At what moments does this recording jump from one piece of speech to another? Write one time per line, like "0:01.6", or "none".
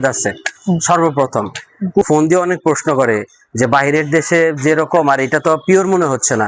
0:02.0